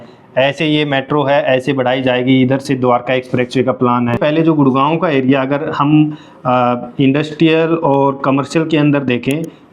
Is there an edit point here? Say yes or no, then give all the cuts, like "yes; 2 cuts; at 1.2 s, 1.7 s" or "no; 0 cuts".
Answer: yes; 1 cut; at 4.2 s